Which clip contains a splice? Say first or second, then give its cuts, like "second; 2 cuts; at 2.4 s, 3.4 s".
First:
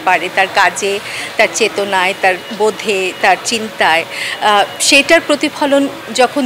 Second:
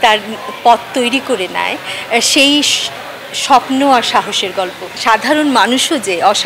second; 1 cut; at 4.9 s